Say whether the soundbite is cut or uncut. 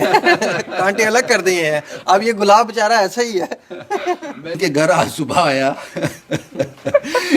cut